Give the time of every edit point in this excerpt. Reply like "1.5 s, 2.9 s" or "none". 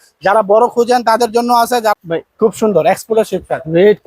1.9 s